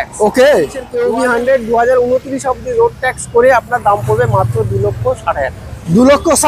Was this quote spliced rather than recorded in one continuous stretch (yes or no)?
yes